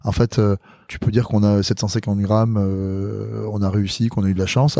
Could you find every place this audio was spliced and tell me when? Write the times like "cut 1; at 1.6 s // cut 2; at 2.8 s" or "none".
cut 1; at 0.9 s

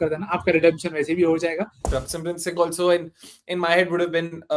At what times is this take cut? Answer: cut 1; at 1.9 s

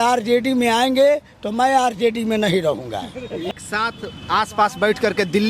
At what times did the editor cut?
cut 1; at 3.5 s

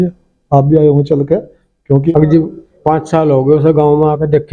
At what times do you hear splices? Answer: cut 1; at 2.1 s

